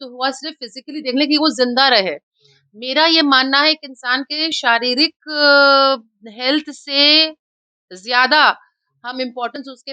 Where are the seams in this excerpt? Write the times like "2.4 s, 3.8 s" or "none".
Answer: none